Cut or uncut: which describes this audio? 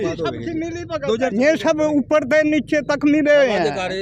cut